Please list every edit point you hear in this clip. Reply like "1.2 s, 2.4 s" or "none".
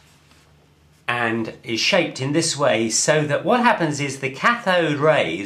none

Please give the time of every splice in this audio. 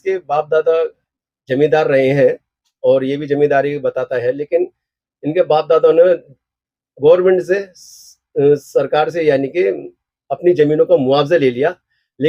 none

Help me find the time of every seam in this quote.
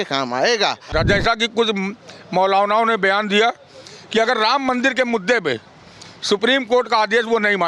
0.9 s

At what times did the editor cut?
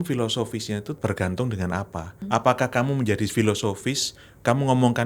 1.0 s, 2.2 s

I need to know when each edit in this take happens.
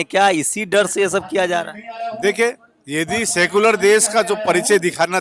none

